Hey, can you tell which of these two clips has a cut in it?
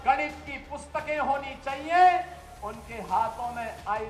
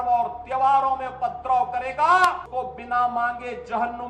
second; 1 cut; at 2.5 s

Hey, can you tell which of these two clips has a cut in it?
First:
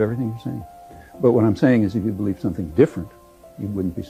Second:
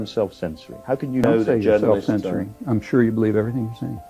second; 1 cut; at 1.2 s

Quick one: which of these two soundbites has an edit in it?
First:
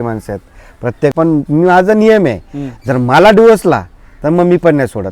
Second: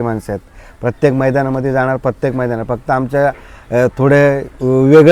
first; 1 cut; at 1.1 s

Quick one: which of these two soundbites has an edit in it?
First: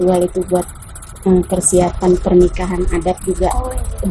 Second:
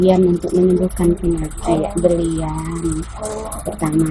second; 1 cut; at 1.7 s

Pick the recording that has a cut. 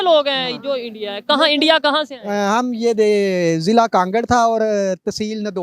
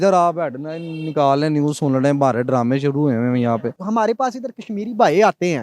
second; 1 cut; at 3.7 s

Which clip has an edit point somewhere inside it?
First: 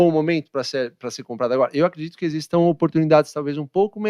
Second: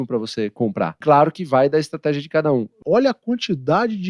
second; 2 cuts; at 1.0 s, 2.7 s

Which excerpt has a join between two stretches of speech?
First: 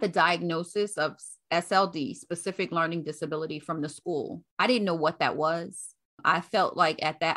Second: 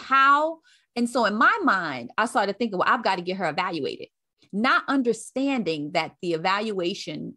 first; 1 cut; at 4.4 s

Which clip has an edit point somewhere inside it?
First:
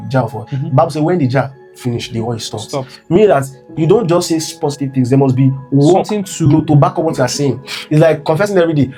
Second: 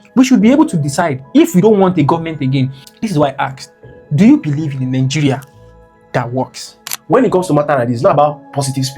second; 2 cuts; at 2.8 s, 6.9 s

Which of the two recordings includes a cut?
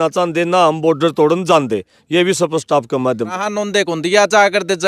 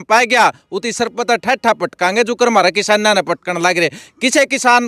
first; 1 cut; at 3.3 s

